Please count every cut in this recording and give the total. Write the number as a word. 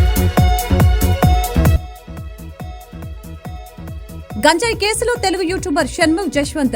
one